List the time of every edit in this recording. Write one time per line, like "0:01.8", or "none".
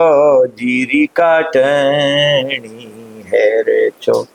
none